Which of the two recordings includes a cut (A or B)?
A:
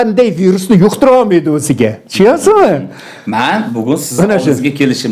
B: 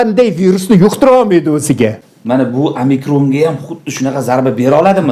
B